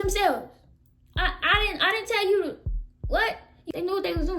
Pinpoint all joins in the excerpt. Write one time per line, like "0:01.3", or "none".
0:03.5